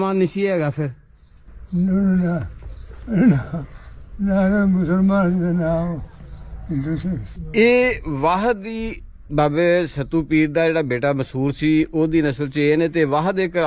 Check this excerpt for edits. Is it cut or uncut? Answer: cut